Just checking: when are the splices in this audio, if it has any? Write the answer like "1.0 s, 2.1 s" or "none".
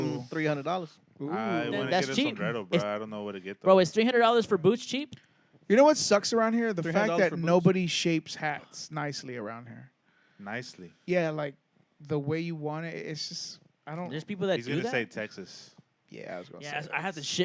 none